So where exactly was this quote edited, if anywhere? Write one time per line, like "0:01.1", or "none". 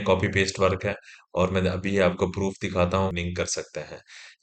0:03.1